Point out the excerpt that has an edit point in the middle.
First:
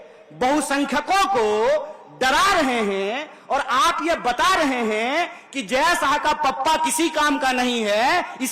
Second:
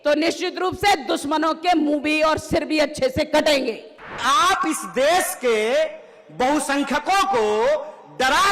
second; 1 cut; at 4.2 s

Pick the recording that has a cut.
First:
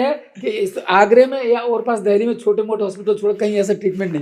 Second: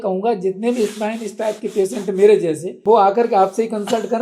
second; 1 cut; at 2.7 s

